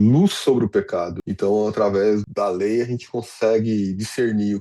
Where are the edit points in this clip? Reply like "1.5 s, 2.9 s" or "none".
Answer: 1.2 s, 2.2 s